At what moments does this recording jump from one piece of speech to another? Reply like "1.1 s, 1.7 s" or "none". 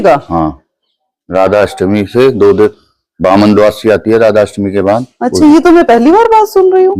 none